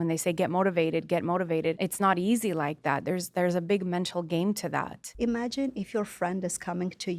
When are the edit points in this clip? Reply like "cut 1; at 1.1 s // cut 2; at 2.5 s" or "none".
cut 1; at 1.8 s // cut 2; at 5.0 s